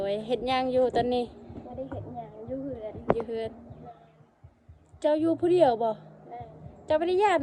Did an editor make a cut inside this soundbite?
no; 0 cuts

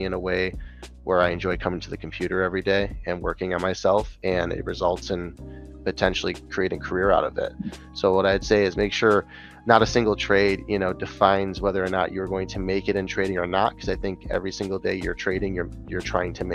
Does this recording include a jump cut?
no; 0 cuts

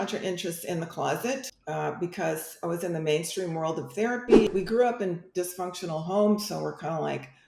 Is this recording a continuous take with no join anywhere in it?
no; 2 cuts; at 1.5 s, 4.5 s

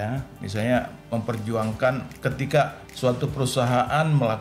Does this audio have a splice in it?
yes; 1 cut; at 2.8 s

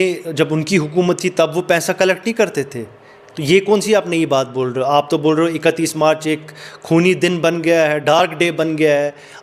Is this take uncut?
yes; 0 cuts

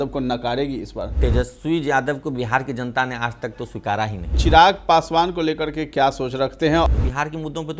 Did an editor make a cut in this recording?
yes; 3 cuts; at 1.2 s, 4.4 s, 6.9 s

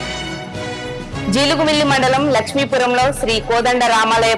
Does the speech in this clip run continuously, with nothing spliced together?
no; 1 cut; at 0.9 s

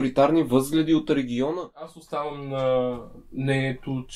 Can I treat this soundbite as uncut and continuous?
no; 1 cut; at 1.9 s

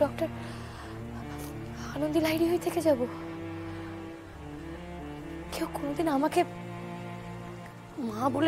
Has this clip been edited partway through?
no; 0 cuts

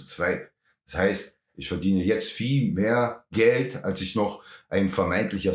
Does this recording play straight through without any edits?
yes; 0 cuts

